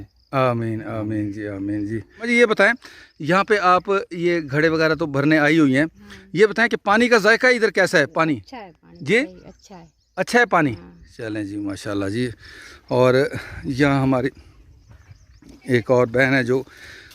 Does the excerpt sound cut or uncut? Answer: cut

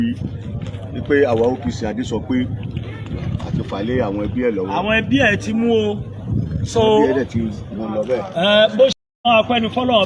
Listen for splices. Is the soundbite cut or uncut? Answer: cut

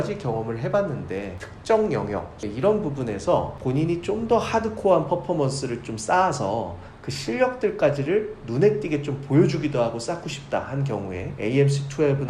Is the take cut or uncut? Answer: cut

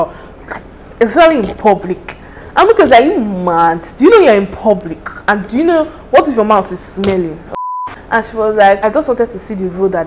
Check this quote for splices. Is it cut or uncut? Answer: cut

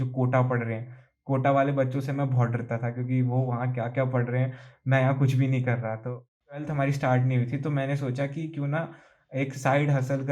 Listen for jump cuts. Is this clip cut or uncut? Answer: cut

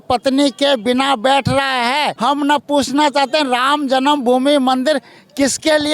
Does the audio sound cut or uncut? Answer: cut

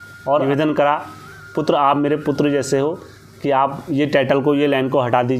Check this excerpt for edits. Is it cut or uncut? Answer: uncut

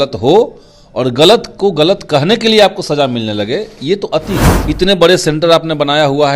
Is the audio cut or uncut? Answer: cut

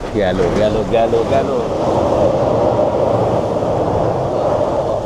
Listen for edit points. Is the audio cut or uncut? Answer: uncut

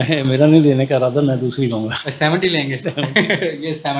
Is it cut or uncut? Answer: uncut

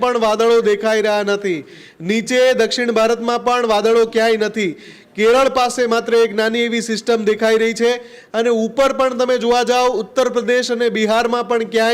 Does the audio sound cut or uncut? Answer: uncut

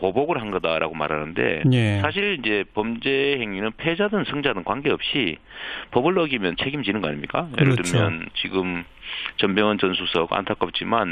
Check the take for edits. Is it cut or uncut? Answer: uncut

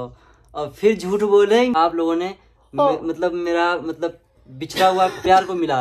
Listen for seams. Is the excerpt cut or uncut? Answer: cut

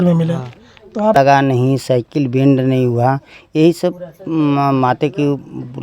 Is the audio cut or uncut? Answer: cut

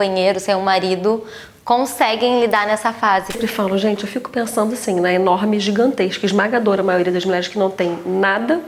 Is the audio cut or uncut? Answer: cut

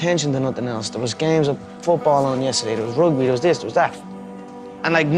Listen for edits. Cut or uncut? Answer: uncut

